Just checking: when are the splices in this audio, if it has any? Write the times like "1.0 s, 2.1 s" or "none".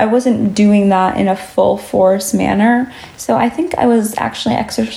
none